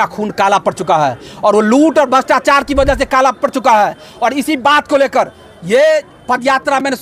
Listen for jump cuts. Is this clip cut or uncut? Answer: uncut